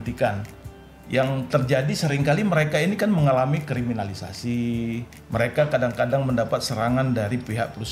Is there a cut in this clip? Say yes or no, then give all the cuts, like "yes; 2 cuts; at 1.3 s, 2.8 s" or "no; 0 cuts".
yes; 1 cut; at 5.1 s